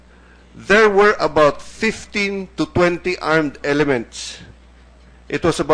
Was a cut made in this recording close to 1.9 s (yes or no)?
yes